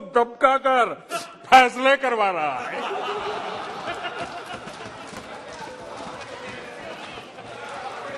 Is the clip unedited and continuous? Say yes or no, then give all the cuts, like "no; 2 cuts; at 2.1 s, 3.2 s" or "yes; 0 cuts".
yes; 0 cuts